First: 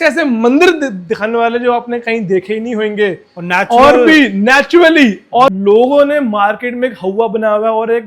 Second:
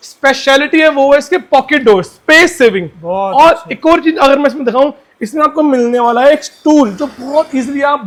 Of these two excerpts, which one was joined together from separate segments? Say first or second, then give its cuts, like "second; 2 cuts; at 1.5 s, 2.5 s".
first; 1 cut; at 5.5 s